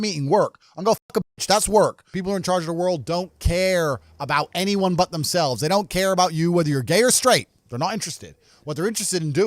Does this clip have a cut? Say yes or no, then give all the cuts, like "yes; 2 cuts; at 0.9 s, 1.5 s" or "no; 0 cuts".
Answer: yes; 1 cut; at 2.1 s